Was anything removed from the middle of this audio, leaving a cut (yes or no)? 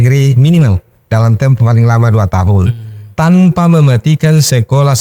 no